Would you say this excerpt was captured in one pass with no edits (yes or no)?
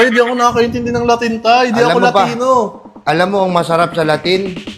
yes